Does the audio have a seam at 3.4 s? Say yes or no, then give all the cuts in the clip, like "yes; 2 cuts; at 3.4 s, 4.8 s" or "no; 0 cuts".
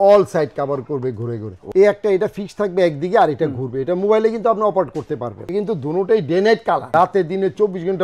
no; 3 cuts; at 1.6 s, 5.4 s, 6.9 s